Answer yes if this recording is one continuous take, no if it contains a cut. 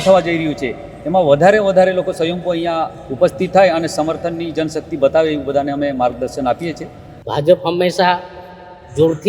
no